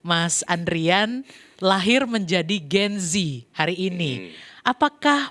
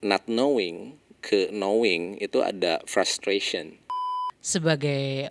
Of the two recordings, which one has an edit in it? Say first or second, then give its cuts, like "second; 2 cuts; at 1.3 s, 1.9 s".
second; 1 cut; at 4.0 s